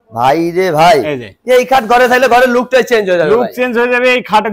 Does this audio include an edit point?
no; 0 cuts

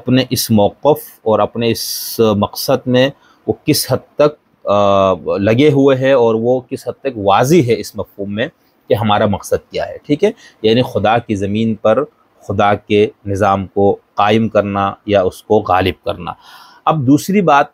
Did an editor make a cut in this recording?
no; 0 cuts

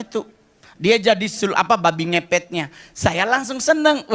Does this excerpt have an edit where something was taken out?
yes; 1 cut; at 2.6 s

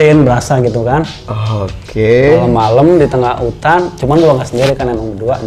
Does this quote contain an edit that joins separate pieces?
no; 0 cuts

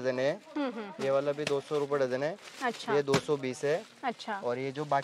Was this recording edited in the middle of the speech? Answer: no; 0 cuts

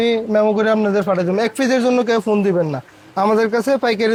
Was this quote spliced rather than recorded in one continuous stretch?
no; 0 cuts

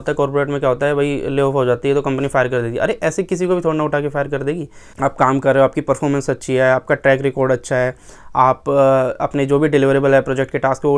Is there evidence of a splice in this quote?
yes; 1 cut; at 4.9 s

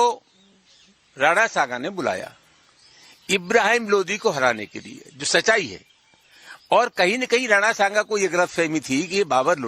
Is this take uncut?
no; 1 cut; at 7.2 s

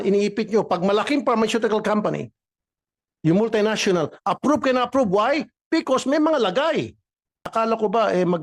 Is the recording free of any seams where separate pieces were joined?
no; 1 cut; at 7.5 s

